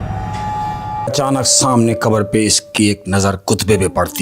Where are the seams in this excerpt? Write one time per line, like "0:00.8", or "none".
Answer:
0:01.1